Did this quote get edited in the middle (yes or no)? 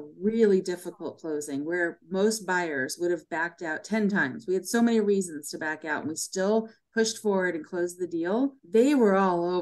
yes